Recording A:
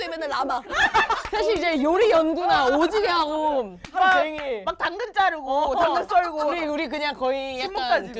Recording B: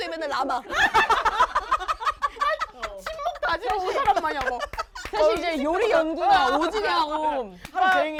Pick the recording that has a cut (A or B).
A